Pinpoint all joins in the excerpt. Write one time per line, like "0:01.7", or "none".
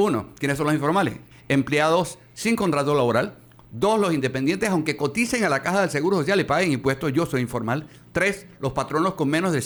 none